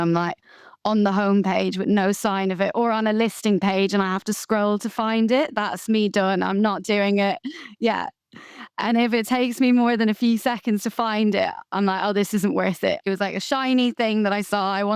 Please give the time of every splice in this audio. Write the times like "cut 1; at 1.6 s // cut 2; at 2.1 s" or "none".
cut 1; at 11.7 s // cut 2; at 13.0 s